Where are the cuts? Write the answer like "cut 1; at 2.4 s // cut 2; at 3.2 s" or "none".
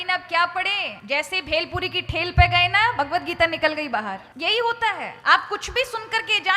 cut 1; at 0.9 s // cut 2; at 4.3 s // cut 3; at 5.1 s

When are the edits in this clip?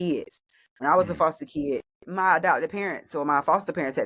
cut 1; at 2.0 s

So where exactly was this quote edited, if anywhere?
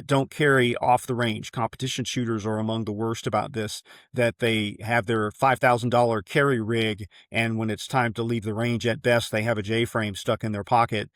none

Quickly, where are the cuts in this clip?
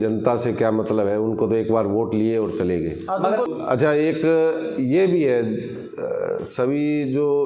cut 1; at 3.5 s

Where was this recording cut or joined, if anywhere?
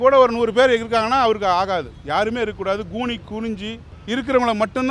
cut 1; at 3.9 s

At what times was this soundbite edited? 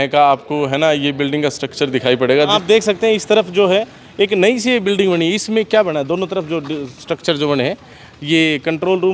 cut 1; at 2.5 s

